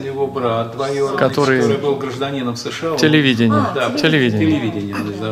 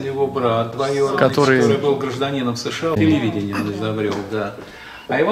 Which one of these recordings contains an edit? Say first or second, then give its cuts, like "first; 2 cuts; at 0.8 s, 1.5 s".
second; 1 cut; at 3.0 s